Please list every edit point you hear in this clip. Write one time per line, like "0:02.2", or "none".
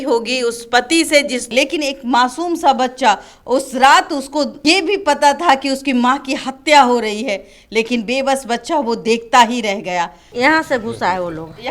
0:01.5
0:04.5
0:10.2